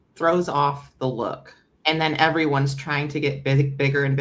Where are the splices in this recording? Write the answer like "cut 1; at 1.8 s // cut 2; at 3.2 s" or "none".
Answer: cut 1; at 1.7 s